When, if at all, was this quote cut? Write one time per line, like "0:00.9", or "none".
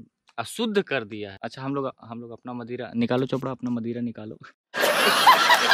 none

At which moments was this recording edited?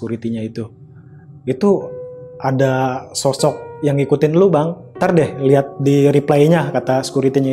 0:03.7
0:04.8

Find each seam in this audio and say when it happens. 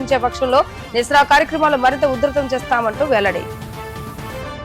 none

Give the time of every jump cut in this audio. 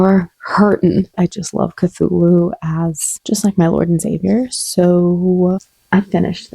0:01.1
0:05.6

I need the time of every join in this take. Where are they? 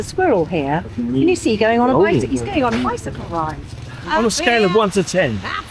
0:03.9

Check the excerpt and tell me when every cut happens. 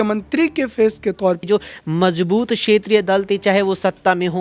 0:01.4

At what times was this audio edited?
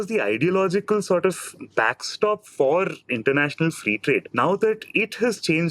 none

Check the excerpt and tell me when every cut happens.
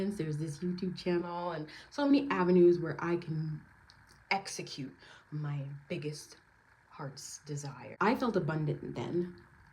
0:07.8

